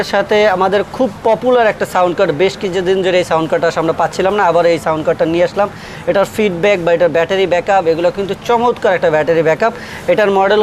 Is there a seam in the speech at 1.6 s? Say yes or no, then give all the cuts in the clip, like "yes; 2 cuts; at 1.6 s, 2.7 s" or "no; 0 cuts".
no; 0 cuts